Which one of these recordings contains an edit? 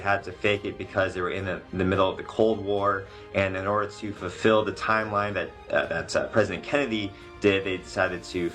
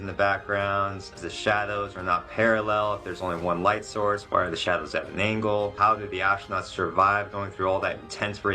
second; 3 cuts; at 1.1 s, 4.2 s, 5.7 s

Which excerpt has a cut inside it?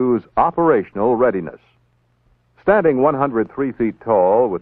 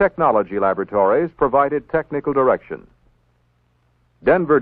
first; 1 cut; at 1.7 s

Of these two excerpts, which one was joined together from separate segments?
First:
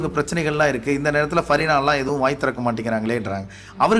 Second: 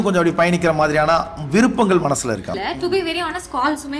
second; 1 cut; at 2.5 s

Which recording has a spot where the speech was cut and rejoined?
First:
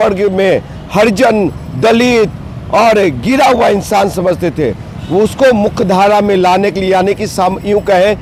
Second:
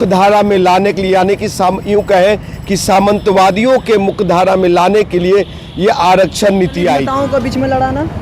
second; 1 cut; at 7.1 s

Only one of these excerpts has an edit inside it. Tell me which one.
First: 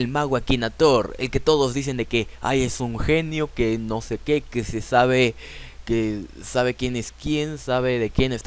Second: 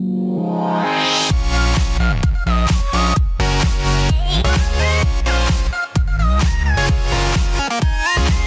first; 1 cut; at 2.8 s

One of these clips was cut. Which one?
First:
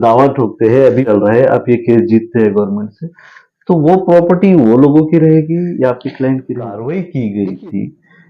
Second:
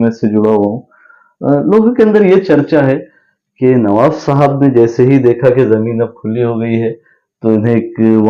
first; 2 cuts; at 1.0 s, 6.8 s

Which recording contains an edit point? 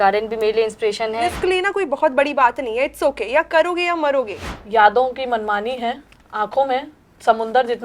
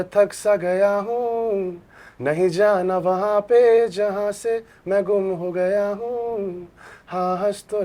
first; 2 cuts; at 1.3 s, 4.4 s

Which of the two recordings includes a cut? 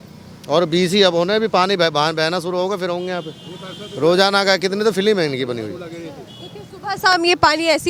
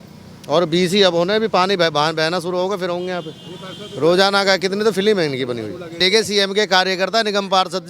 second; 1 cut; at 5.9 s

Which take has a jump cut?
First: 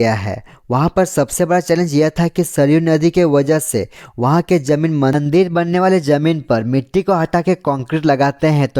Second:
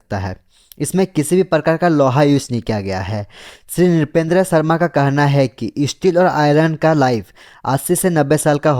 first; 1 cut; at 5.1 s

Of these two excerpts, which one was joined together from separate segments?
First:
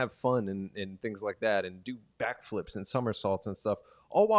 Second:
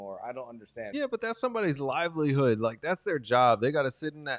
second; 1 cut; at 0.9 s

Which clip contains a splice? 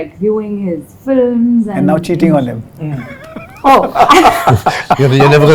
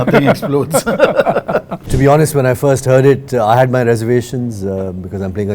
second; 1 cut; at 1.8 s

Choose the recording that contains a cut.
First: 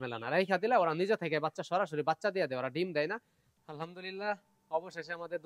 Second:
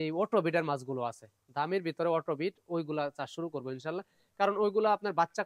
first; 1 cut; at 3.7 s

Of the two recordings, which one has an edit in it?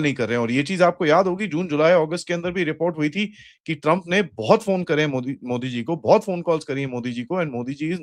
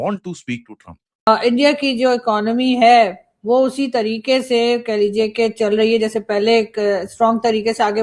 second; 1 cut; at 1.1 s

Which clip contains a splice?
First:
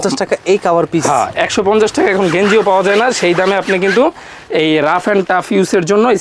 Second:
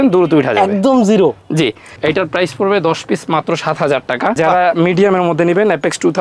second; 2 cuts; at 1.9 s, 4.4 s

